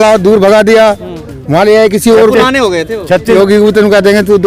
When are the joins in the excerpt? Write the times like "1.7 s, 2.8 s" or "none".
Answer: 3.4 s